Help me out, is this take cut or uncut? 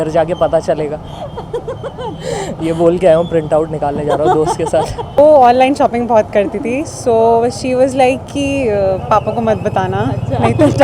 cut